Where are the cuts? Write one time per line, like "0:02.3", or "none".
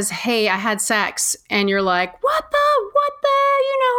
none